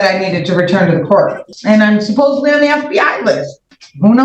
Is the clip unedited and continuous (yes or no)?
no